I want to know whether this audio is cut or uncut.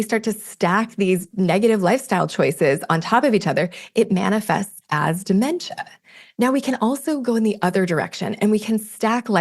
cut